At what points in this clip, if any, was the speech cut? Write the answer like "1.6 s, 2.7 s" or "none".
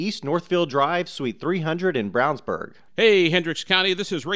2.8 s